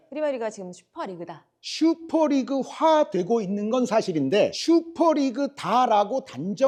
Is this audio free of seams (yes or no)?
yes